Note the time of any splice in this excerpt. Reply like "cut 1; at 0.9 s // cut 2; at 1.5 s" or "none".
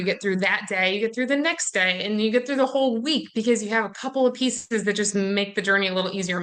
none